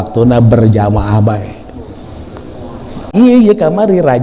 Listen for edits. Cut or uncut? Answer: cut